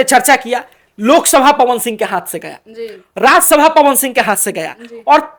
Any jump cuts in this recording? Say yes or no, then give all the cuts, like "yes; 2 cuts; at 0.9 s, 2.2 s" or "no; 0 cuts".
no; 0 cuts